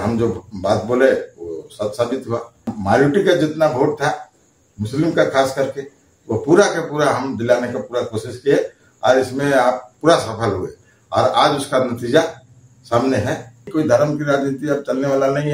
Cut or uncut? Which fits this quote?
cut